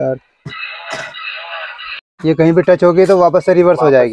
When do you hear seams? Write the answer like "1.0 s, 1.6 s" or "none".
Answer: 1.8 s